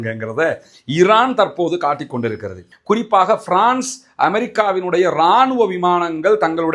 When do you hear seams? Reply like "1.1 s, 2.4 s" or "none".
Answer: 2.7 s